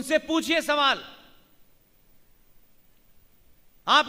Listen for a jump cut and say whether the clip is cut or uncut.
uncut